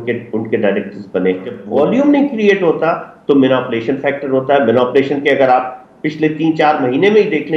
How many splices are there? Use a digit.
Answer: 1